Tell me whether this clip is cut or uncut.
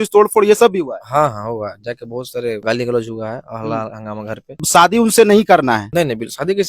cut